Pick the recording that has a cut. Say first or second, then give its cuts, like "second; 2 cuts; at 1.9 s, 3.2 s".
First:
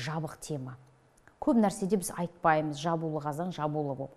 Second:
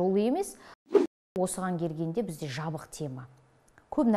second; 1 cut; at 1.1 s